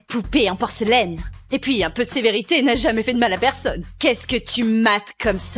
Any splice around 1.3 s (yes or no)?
no